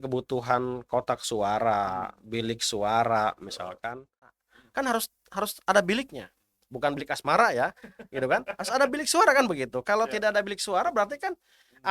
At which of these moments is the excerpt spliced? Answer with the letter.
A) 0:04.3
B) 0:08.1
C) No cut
A